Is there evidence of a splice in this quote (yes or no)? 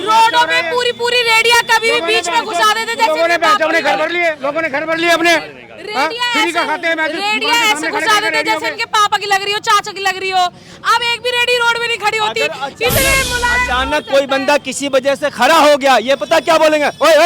no